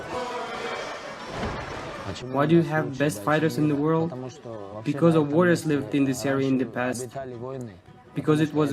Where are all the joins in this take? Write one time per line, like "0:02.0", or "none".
0:04.7